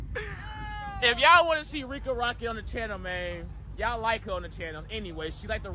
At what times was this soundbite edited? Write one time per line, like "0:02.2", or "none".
none

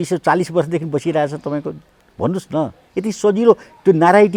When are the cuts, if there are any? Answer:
none

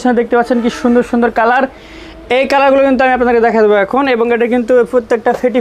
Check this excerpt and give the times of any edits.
none

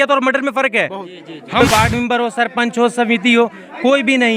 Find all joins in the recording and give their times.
0:01.6

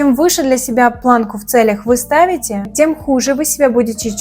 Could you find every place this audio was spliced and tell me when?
0:02.6

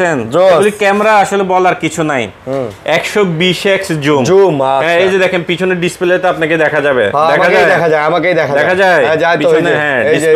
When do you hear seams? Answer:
none

